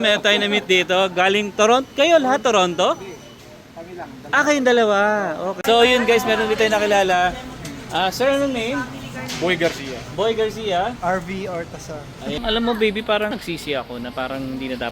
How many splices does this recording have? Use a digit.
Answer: 2